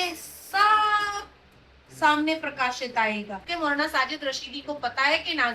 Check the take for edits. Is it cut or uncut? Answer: cut